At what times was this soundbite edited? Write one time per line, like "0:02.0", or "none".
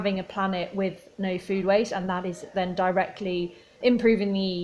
0:03.7